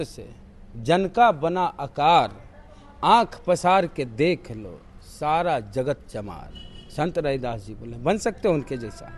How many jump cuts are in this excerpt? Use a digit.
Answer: 0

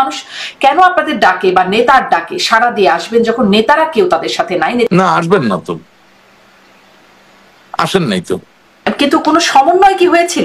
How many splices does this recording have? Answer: 2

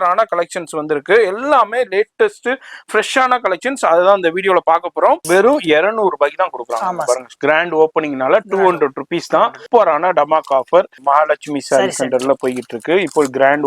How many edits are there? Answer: 3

